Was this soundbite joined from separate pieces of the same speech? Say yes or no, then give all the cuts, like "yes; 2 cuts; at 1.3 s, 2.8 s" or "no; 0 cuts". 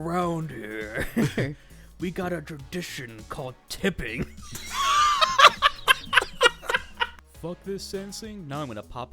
yes; 1 cut; at 7.2 s